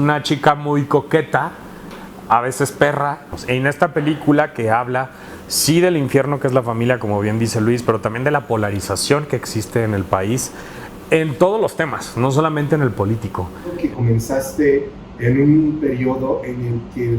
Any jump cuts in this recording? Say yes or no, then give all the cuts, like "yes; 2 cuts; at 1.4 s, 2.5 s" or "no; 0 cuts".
yes; 2 cuts; at 3.3 s, 13.8 s